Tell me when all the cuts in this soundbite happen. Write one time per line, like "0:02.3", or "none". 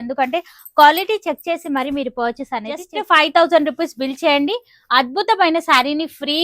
0:02.9

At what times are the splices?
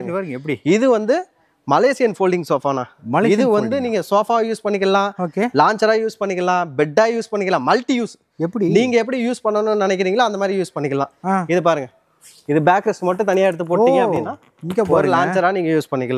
none

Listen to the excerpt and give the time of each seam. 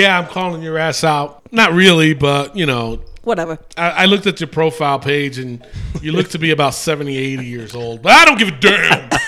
0:01.4

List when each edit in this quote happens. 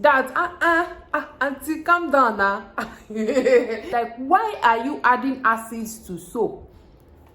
0:03.8

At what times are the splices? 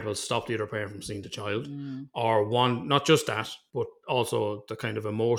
0:03.6

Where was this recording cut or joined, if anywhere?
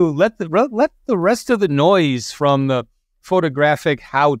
none

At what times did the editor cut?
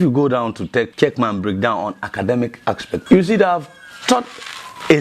0:00.9
0:03.0

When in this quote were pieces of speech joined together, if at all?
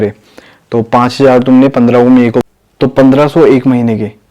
0:02.4

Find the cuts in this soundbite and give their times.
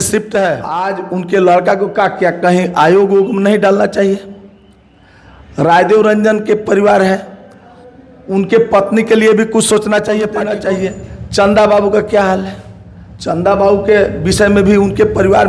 0:00.9
0:10.5

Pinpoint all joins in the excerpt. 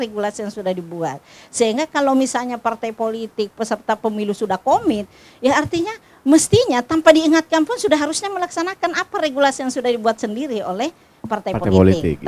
none

